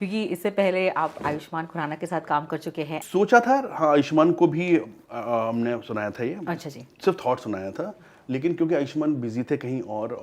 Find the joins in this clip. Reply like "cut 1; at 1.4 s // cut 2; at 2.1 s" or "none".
cut 1; at 3.0 s